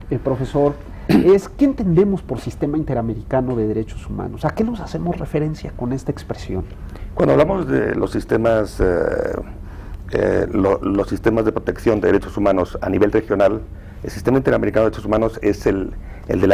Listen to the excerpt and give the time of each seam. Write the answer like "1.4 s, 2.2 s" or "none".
7.4 s

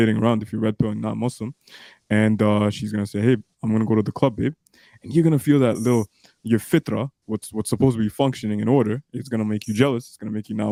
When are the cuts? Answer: none

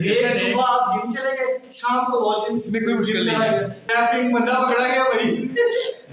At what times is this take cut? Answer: 3.8 s

